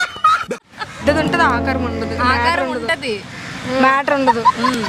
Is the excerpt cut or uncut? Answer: cut